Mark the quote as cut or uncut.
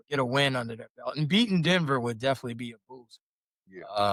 uncut